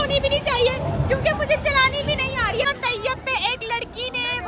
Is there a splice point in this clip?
yes; 1 cut; at 2.7 s

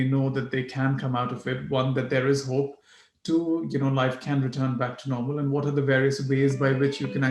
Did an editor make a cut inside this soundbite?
no; 0 cuts

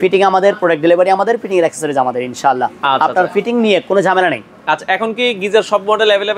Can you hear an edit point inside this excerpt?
no; 0 cuts

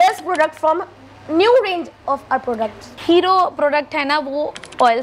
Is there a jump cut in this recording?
no; 0 cuts

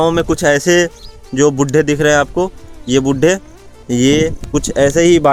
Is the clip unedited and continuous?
yes; 0 cuts

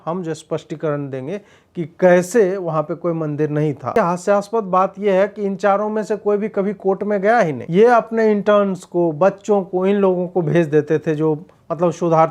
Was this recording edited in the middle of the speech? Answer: yes; 2 cuts; at 3.9 s, 7.6 s

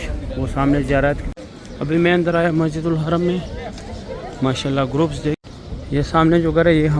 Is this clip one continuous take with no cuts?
no; 2 cuts; at 1.2 s, 5.4 s

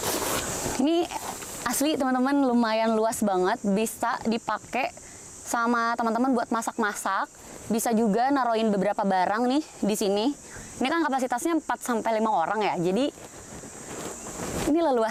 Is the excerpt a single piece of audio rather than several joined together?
yes; 0 cuts

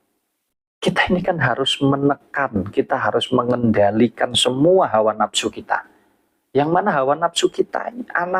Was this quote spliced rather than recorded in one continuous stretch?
no; 0 cuts

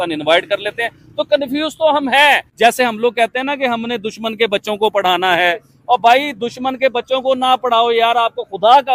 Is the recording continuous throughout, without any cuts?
no; 1 cut; at 2.5 s

